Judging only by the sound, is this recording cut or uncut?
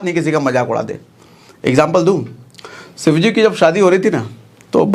uncut